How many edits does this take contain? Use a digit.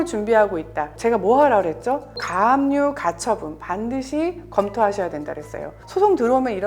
1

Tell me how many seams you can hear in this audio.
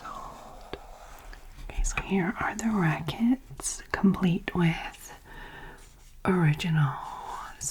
1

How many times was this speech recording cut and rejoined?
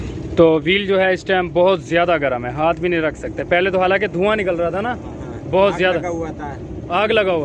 0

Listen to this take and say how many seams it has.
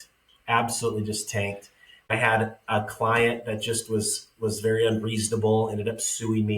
1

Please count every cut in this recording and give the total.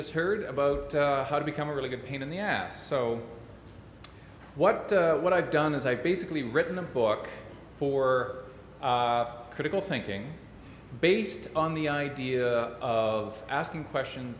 0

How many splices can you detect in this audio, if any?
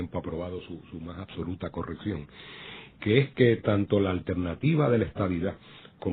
1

